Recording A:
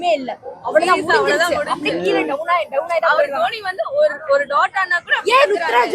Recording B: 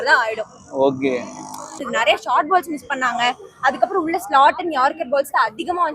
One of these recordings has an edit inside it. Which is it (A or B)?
B